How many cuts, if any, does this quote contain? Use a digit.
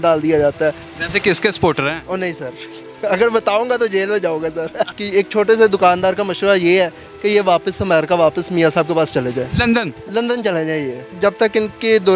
3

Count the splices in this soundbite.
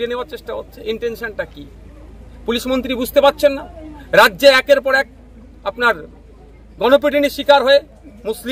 0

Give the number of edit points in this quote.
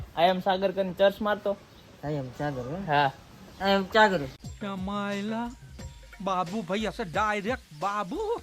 0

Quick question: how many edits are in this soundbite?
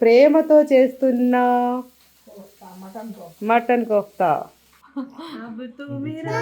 1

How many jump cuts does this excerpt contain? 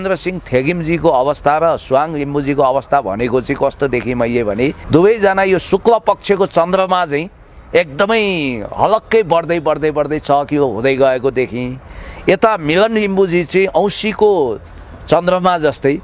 1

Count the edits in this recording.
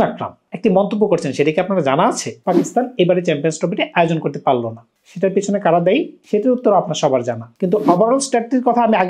2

